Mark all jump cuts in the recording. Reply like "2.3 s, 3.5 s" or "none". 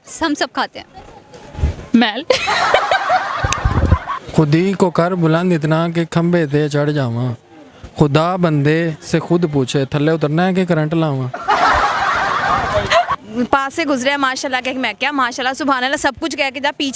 4.2 s, 13.2 s